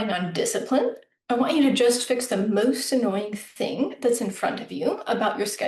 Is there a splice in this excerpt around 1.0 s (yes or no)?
no